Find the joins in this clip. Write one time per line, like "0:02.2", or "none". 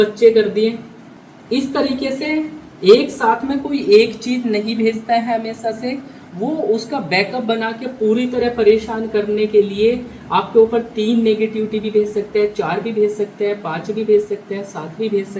none